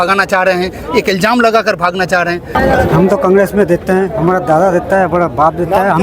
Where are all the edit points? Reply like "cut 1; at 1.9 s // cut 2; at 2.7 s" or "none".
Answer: cut 1; at 2.5 s